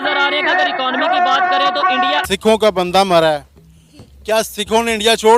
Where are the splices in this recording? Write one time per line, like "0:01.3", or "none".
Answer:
0:02.2